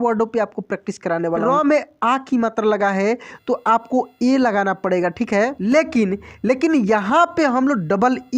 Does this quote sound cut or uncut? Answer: cut